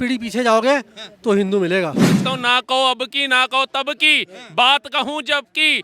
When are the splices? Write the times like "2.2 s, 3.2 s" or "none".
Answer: 2.2 s